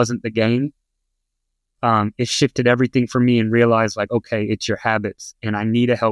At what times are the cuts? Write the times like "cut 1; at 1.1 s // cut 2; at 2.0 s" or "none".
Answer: none